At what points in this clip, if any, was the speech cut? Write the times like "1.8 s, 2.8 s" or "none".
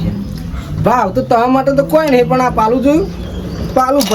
none

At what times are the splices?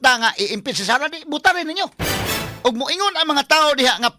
2.5 s

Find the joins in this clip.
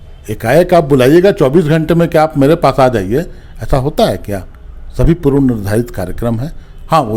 none

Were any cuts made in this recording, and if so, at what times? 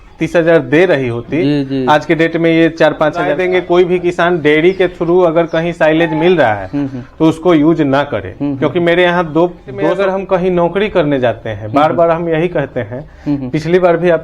3.3 s, 9.9 s

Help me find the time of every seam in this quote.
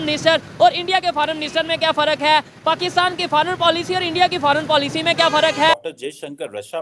none

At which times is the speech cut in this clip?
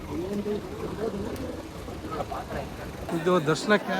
3.1 s

